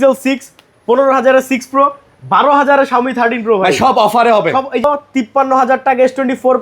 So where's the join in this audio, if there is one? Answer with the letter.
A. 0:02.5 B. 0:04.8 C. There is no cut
B